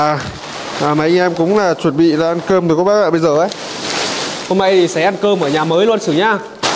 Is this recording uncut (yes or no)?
yes